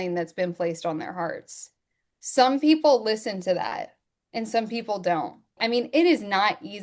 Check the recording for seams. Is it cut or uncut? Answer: cut